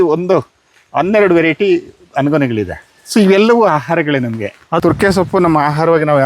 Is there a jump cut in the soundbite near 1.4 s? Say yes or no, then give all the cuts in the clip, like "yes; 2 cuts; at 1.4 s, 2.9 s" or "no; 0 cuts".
no; 1 cut; at 4.8 s